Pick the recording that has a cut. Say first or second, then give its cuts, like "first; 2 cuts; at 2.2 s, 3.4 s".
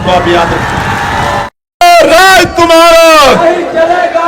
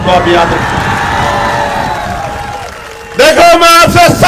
first; 1 cut; at 1.8 s